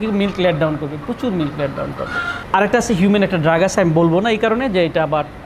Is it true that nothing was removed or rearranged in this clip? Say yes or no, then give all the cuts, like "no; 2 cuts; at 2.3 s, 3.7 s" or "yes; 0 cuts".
no; 1 cut; at 2.3 s